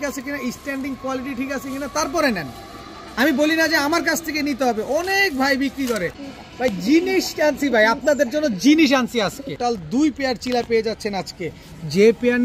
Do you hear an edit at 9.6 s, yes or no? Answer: yes